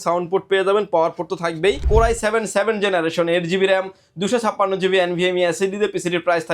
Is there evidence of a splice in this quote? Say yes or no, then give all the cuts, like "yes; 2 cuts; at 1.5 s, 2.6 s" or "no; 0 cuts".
yes; 1 cut; at 1.9 s